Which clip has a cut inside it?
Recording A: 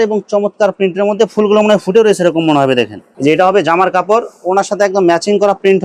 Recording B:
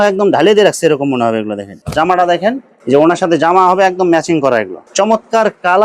B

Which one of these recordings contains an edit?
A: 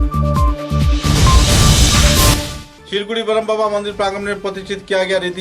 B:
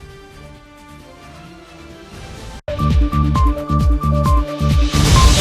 A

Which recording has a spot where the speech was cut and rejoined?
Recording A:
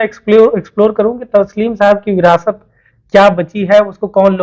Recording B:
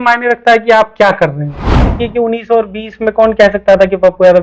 B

